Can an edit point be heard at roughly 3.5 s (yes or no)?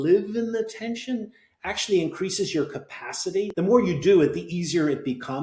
yes